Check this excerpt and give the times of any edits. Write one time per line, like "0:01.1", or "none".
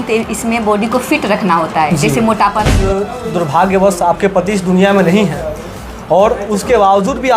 0:02.8